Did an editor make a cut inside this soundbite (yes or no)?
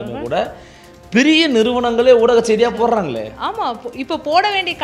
no